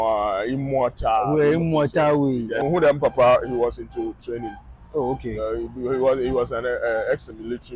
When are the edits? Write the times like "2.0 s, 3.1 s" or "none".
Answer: 2.6 s